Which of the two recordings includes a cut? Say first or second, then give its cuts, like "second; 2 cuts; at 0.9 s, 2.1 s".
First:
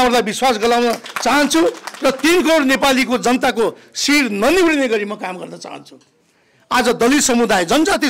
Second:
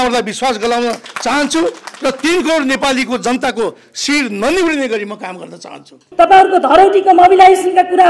second; 1 cut; at 6.0 s